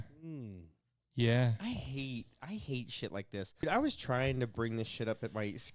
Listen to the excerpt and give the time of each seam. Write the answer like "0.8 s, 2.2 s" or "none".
3.6 s